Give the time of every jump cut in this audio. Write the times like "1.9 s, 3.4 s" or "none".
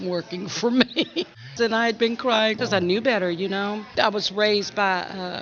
1.5 s, 2.6 s, 3.9 s